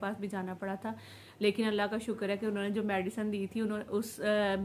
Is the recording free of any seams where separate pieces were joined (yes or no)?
yes